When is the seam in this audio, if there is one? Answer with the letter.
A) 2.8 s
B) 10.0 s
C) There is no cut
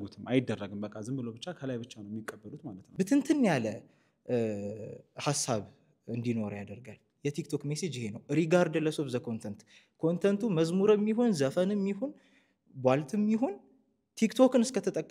A